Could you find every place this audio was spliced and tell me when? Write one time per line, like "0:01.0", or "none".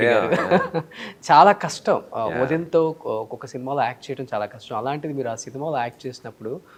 none